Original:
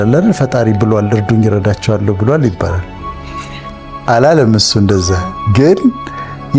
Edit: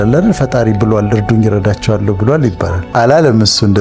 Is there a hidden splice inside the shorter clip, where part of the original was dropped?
yes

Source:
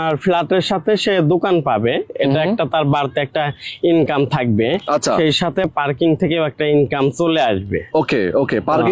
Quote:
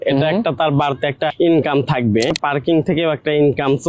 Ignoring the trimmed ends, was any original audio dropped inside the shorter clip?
yes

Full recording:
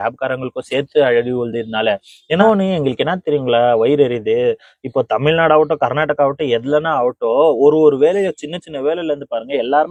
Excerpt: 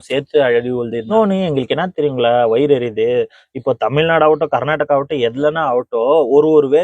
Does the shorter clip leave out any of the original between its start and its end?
yes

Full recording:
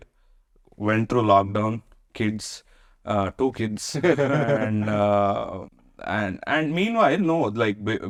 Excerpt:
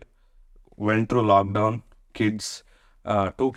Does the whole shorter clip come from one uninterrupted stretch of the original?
yes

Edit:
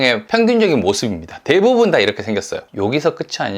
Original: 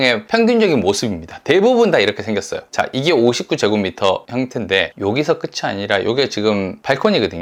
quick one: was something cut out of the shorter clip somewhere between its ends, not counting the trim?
yes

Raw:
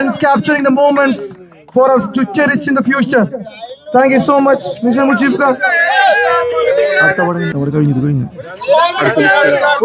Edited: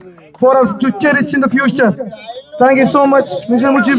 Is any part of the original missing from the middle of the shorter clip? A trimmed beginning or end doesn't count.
no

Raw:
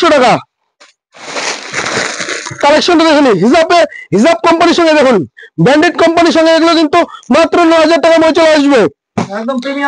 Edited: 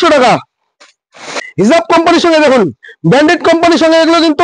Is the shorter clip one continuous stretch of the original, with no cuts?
no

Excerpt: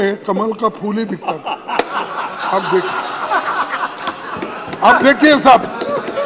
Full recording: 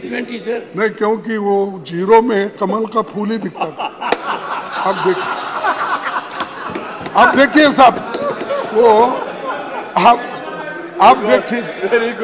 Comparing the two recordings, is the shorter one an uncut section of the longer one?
yes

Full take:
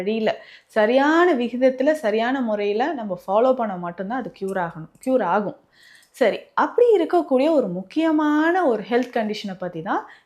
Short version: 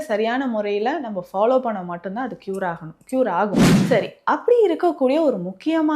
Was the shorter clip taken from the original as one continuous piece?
no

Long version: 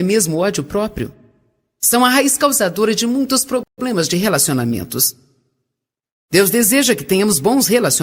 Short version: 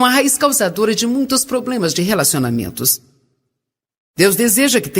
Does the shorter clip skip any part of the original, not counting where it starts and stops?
yes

